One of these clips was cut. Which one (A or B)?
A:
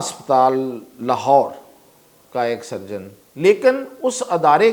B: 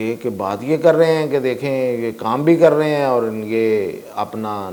A